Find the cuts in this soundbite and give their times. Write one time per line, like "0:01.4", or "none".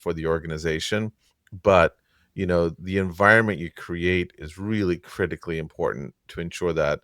none